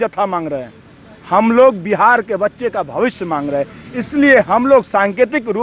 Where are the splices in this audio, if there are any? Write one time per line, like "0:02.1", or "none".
none